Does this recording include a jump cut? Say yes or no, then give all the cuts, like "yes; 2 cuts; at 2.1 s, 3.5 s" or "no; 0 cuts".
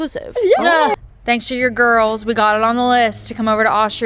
yes; 1 cut; at 0.9 s